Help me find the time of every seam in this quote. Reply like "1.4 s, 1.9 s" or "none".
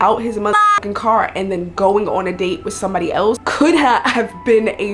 3.4 s